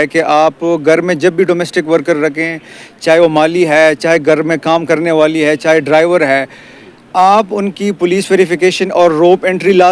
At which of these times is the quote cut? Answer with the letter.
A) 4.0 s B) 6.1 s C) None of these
C